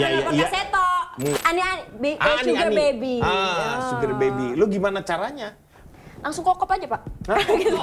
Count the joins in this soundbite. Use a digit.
1